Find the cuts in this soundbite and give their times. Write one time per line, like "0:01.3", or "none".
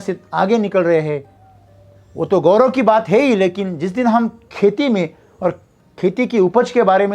none